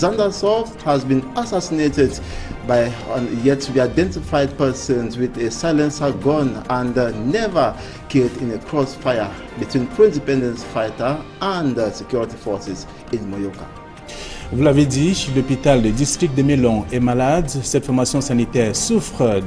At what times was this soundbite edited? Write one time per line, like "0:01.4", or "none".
0:01.0